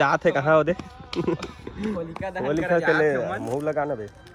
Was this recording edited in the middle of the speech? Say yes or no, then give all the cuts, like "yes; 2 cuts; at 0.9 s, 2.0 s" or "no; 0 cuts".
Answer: no; 0 cuts